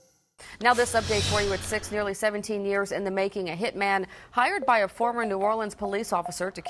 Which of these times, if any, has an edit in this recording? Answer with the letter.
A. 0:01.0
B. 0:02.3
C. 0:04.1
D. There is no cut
D